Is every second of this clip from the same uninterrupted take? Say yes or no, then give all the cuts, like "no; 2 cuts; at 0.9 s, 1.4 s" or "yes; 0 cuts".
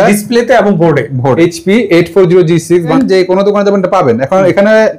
no; 2 cuts; at 1.4 s, 2.9 s